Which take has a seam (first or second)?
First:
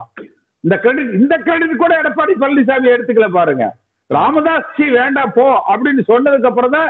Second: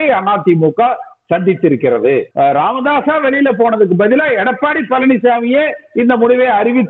second